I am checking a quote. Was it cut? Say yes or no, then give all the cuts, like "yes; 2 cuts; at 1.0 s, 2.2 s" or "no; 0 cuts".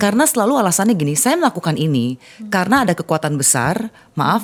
no; 0 cuts